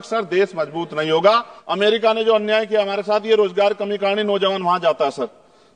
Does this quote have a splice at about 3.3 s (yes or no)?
no